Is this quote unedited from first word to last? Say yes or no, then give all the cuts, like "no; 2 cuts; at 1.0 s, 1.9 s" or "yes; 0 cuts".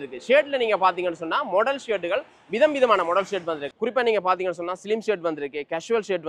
yes; 0 cuts